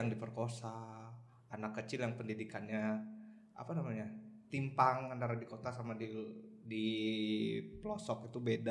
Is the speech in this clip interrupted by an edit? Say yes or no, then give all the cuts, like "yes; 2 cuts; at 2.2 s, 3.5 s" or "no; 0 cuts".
no; 0 cuts